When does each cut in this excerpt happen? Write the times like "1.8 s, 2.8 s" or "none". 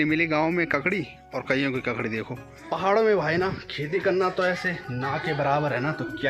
2.5 s